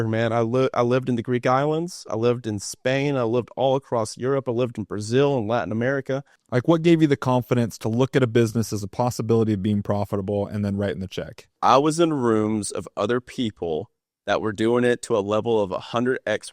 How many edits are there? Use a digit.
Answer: 2